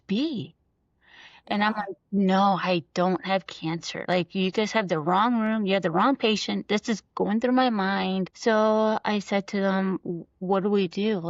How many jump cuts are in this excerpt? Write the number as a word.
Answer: one